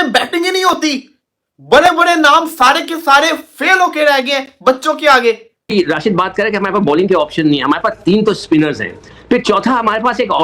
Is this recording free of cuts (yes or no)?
no